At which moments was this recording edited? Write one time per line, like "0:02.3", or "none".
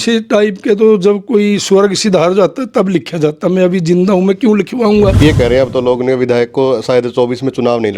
0:05.2